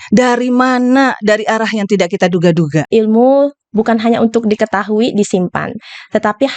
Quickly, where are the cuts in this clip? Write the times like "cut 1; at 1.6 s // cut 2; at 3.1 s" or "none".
cut 1; at 2.9 s